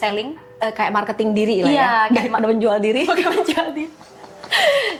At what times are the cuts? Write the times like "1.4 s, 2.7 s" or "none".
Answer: none